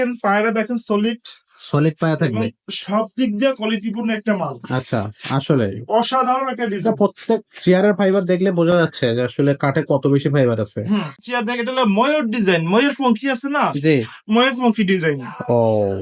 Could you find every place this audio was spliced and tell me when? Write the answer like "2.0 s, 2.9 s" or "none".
11.2 s

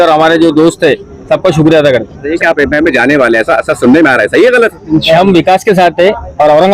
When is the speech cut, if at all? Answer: 2.3 s

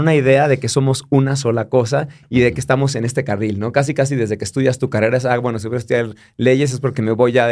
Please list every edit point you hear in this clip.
none

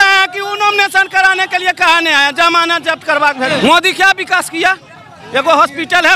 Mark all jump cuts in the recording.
3.5 s

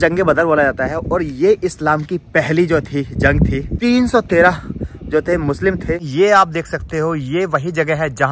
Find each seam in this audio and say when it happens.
3.7 s, 6.1 s

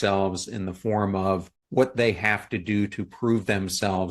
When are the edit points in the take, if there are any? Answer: 1.6 s

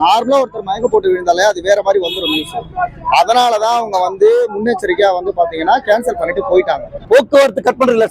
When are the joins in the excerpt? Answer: 6.9 s

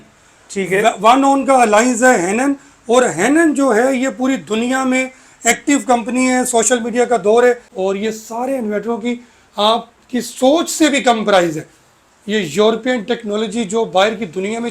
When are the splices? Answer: 7.7 s

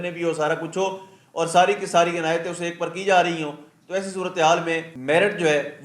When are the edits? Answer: 4.9 s

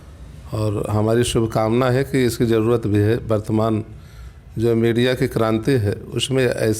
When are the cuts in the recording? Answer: none

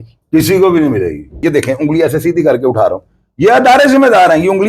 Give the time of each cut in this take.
1.4 s

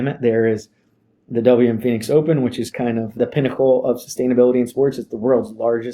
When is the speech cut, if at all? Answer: 3.2 s

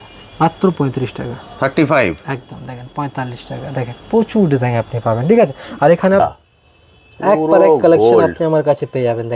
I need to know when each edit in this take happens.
6.2 s

